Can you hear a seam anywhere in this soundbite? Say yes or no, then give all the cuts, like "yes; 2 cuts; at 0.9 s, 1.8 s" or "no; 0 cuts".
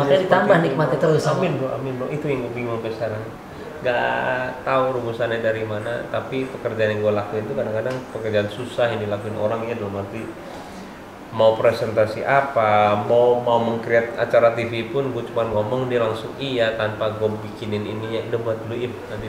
no; 0 cuts